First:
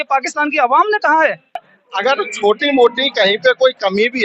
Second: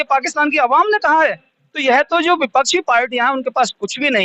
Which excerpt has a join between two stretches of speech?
first; 1 cut; at 1.7 s

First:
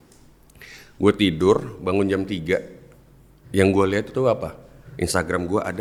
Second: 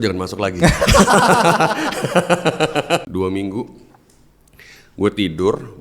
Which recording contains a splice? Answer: second; 1 cut; at 3.1 s

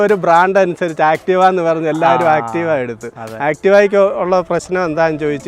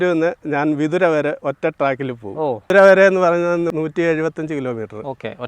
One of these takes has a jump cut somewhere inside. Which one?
second; 1 cut; at 2.7 s

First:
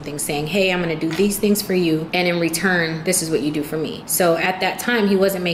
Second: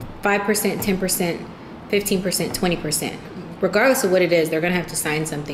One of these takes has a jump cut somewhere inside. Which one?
first; 3 cuts; at 1.0 s, 2.1 s, 4.0 s

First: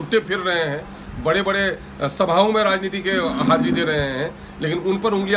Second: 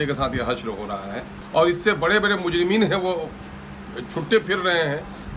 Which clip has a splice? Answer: second; 1 cut; at 1.3 s

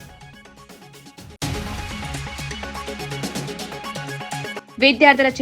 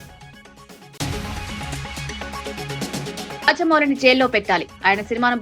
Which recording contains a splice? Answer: first; 2 cuts; at 0.9 s, 4.5 s

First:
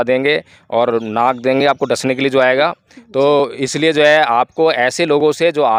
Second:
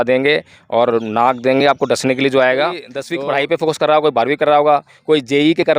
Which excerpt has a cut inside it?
second; 1 cut; at 3.0 s

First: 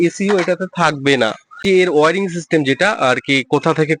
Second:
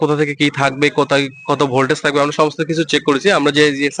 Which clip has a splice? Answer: first; 1 cut; at 1.5 s

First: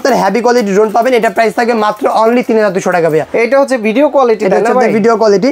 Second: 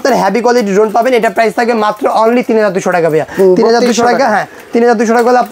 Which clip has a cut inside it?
first; 1 cut; at 3.3 s

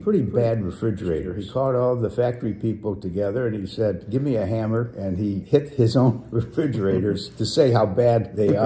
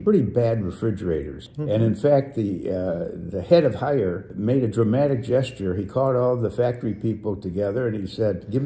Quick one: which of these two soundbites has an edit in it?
first; 2 cuts; at 1.4 s, 5.0 s

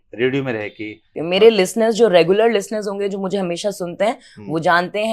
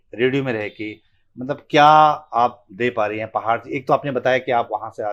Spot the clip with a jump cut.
first; 1 cut; at 1.1 s

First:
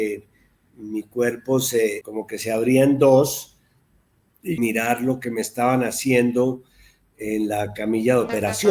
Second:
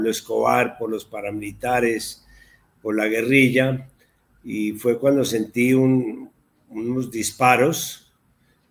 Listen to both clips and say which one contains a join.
first; 2 cuts; at 2.0 s, 4.6 s

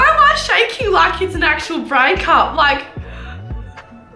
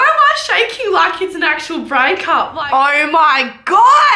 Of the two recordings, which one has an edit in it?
second; 1 cut; at 2.6 s

